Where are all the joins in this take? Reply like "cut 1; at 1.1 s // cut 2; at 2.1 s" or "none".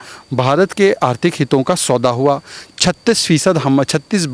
none